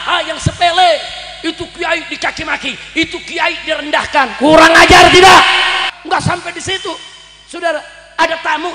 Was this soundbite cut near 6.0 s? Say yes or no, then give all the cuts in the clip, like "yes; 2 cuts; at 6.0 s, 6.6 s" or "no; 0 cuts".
yes; 1 cut; at 6.0 s